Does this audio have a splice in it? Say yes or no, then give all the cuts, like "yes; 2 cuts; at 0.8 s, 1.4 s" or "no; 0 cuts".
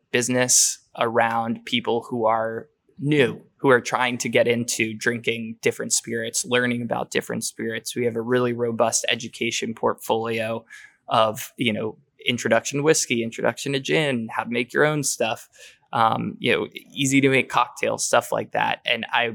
no; 0 cuts